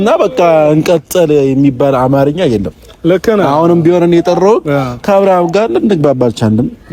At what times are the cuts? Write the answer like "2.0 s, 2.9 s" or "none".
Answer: none